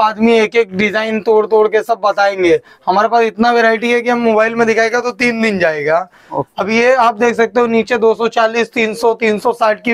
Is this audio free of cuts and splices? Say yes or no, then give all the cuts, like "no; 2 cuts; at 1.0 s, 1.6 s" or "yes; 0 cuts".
yes; 0 cuts